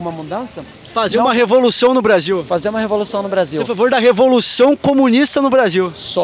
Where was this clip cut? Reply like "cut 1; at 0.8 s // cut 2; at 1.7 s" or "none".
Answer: none